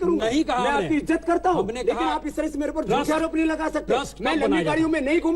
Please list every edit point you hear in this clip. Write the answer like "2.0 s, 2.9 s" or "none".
none

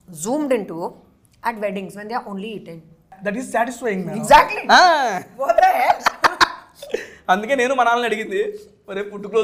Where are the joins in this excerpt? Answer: 3.2 s

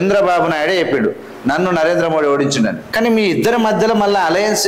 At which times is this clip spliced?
2.8 s

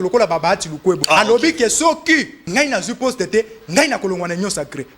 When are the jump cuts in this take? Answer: 1.0 s, 2.4 s

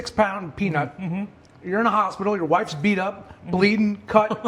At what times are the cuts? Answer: none

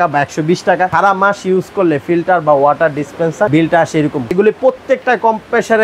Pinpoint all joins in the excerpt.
0.9 s, 3.5 s, 4.3 s

